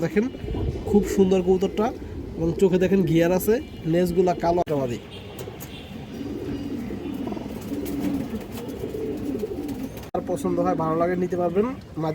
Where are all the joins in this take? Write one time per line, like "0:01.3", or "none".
0:04.6
0:10.2